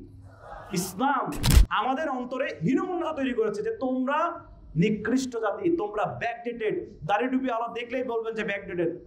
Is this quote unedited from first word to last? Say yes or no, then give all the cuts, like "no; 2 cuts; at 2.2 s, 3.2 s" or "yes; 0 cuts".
no; 1 cut; at 1.5 s